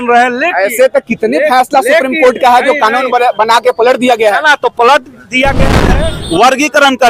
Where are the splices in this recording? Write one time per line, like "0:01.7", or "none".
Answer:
0:05.9